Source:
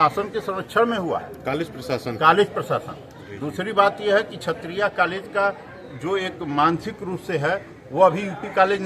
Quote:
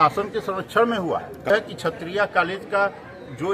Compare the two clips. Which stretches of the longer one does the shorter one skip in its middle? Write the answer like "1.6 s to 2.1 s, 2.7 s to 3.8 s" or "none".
1.5 s to 4.1 s